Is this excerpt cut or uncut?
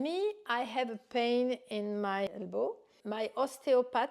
cut